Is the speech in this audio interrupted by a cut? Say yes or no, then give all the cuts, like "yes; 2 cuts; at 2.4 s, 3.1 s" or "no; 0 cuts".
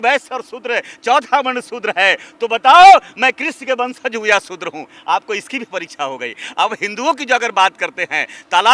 no; 0 cuts